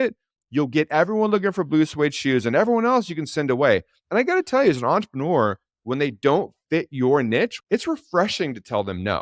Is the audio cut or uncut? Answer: cut